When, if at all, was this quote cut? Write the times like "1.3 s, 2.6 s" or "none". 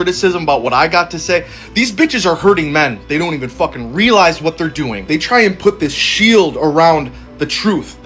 4.7 s, 6.5 s

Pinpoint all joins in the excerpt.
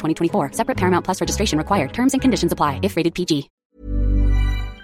3.5 s

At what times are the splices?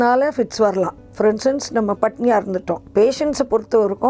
2.8 s

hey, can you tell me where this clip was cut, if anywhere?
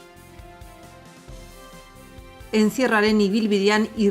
2.3 s

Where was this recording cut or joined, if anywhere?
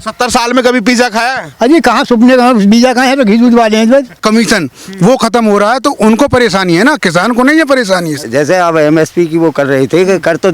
4.2 s, 8.2 s

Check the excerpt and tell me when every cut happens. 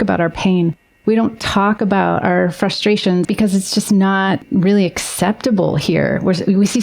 3.2 s, 4.5 s

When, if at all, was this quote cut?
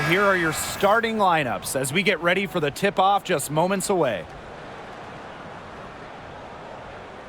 4.3 s

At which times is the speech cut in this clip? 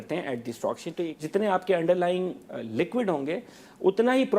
1.1 s

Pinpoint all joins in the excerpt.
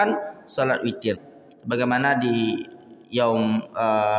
1.3 s

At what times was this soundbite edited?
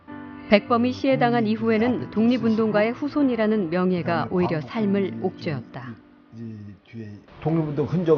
4.2 s

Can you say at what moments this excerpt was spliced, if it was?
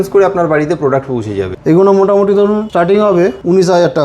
1.5 s, 3.1 s

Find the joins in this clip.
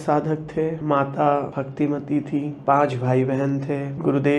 0.8 s, 1.6 s, 2.6 s

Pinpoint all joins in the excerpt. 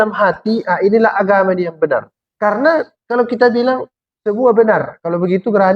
2.2 s

